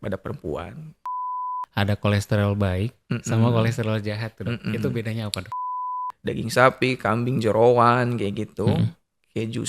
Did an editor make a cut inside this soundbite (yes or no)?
yes